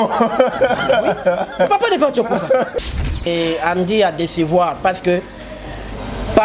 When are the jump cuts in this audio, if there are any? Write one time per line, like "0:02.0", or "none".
0:02.8